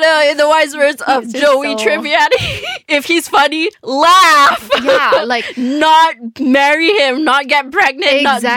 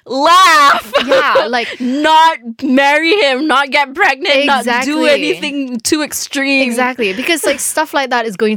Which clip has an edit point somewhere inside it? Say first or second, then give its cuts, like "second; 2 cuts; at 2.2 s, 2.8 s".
first; 1 cut; at 2.8 s